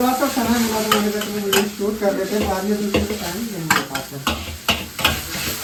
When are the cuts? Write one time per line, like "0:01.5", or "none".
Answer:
none